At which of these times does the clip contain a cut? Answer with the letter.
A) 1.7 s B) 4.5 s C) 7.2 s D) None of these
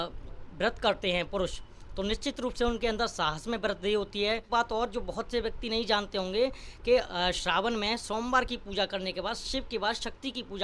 B